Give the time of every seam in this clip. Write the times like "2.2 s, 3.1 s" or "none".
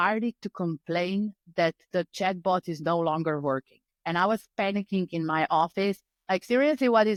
none